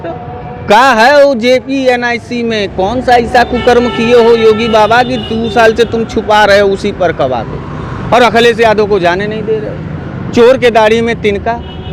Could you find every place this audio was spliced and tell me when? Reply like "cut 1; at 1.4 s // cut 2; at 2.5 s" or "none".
none